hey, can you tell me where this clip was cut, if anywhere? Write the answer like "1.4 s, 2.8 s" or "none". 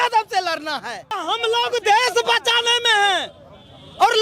1.2 s